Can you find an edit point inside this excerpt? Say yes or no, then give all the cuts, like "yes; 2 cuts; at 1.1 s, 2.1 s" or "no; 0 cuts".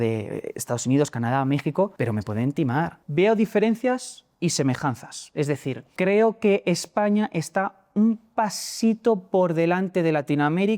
yes; 3 cuts; at 1.9 s, 3.0 s, 5.8 s